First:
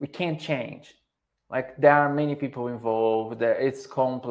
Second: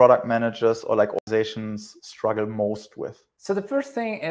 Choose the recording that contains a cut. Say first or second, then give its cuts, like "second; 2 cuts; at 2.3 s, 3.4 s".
second; 2 cuts; at 1.2 s, 3.3 s